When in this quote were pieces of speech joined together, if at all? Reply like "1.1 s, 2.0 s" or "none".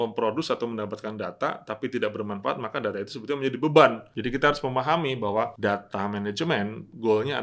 4.1 s, 5.5 s